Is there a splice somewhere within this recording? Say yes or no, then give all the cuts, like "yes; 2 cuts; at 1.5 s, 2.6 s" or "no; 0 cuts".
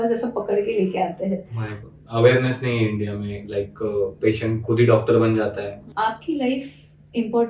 yes; 2 cuts; at 2.0 s, 5.9 s